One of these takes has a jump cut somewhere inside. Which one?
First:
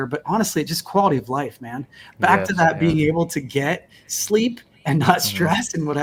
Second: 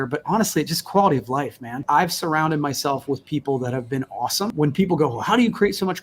second; 2 cuts; at 1.8 s, 4.5 s

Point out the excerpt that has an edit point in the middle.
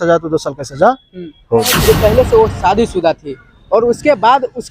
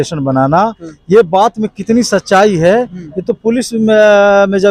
first; 1 cut; at 1.8 s

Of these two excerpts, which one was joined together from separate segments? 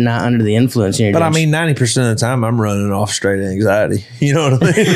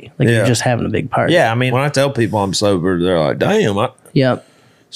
second; 1 cut; at 1.7 s

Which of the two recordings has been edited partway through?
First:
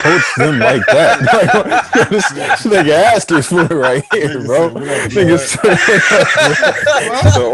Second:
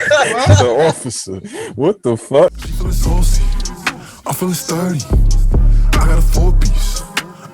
second; 1 cut; at 2.5 s

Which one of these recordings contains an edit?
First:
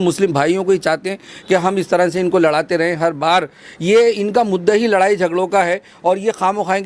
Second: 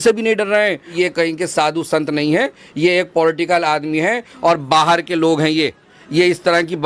second; 1 cut; at 0.9 s

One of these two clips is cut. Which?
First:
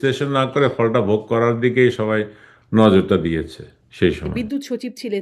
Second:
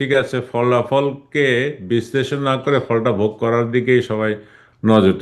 first; 1 cut; at 4.3 s

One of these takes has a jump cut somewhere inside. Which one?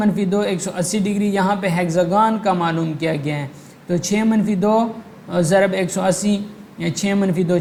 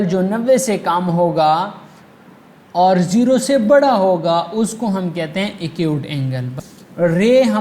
second; 1 cut; at 6.5 s

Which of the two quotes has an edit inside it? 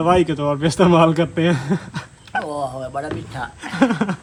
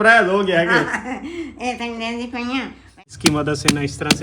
second; 1 cut; at 3.1 s

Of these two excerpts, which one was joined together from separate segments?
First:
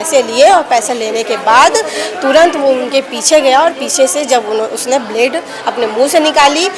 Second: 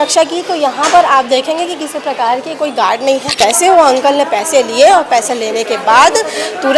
second; 1 cut; at 3.4 s

